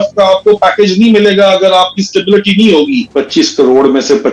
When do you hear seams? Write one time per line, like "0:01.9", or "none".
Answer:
0:03.1